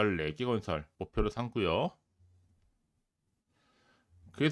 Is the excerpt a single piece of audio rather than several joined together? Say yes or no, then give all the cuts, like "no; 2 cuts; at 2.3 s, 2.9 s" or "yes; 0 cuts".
no; 1 cut; at 1.0 s